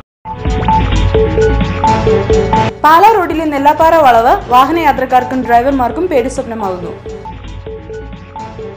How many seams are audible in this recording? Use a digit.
1